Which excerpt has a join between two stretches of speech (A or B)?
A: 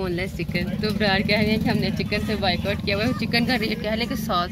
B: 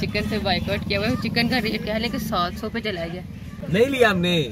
B